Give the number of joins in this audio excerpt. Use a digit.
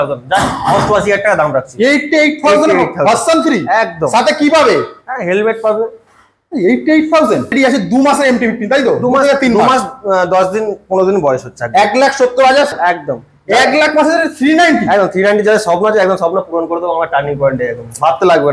2